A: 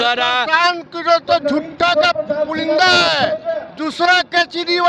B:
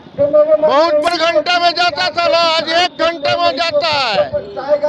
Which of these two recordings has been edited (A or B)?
B